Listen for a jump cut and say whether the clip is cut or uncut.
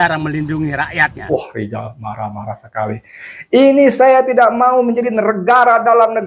cut